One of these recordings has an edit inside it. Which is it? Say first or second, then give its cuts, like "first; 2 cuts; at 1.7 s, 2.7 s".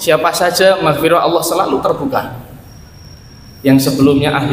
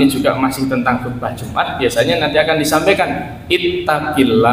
second; 1 cut; at 1.6 s